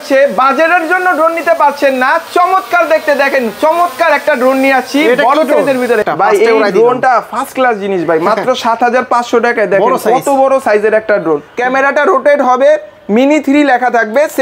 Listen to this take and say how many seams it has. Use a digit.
2